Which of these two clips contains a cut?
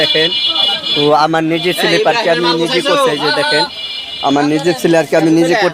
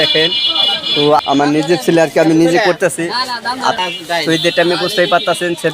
second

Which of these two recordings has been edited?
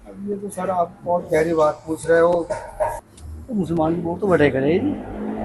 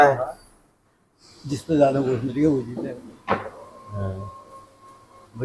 first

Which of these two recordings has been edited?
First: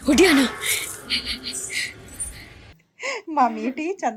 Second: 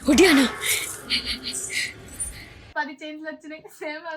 second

